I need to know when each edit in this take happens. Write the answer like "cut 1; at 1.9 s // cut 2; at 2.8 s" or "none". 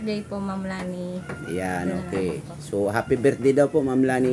none